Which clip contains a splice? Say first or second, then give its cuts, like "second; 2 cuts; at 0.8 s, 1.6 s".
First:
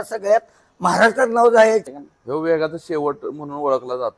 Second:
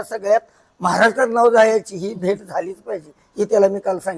first; 1 cut; at 1.9 s